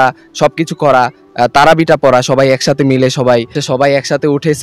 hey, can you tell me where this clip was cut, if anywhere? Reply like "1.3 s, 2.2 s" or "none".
3.6 s